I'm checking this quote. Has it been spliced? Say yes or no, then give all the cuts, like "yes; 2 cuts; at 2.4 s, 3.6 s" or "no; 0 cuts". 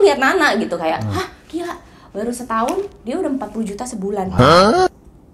no; 0 cuts